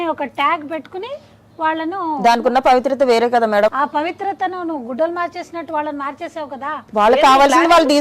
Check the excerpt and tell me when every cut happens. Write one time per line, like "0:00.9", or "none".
0:03.7
0:06.8